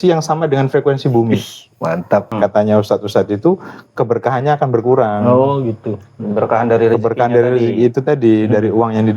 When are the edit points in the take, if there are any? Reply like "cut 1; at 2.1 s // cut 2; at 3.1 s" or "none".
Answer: cut 1; at 2.3 s